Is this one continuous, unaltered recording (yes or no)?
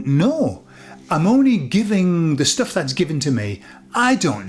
yes